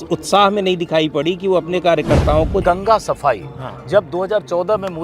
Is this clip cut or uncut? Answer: cut